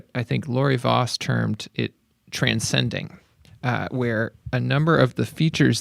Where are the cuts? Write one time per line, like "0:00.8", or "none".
none